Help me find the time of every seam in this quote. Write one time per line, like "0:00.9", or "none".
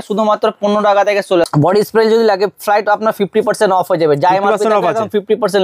0:01.5